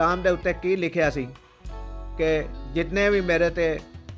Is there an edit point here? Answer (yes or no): no